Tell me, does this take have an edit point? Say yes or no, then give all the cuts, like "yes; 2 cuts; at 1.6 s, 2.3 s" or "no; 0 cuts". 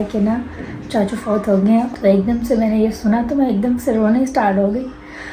no; 0 cuts